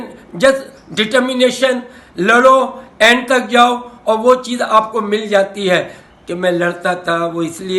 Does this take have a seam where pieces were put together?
yes; 1 cut; at 6.0 s

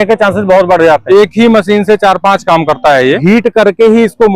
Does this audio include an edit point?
yes; 2 cuts; at 1.0 s, 3.2 s

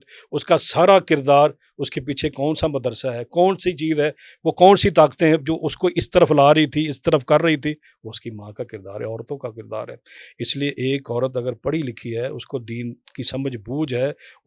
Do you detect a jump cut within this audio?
no; 0 cuts

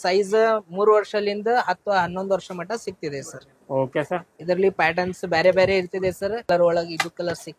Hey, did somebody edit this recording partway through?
yes; 1 cut; at 6.5 s

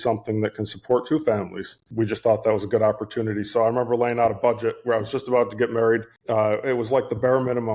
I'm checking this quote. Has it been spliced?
yes; 2 cuts; at 1.8 s, 6.1 s

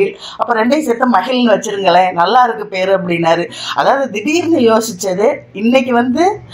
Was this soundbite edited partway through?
no; 0 cuts

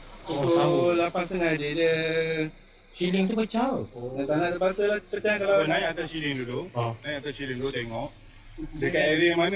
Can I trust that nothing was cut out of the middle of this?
yes; 0 cuts

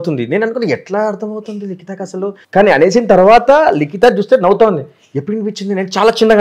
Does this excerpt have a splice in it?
yes; 1 cut; at 2.4 s

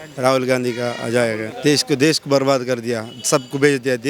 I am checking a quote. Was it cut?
yes; 1 cut; at 1.5 s

